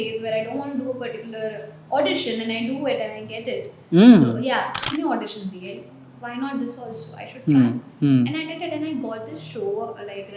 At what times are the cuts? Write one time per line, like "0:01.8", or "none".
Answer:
0:04.8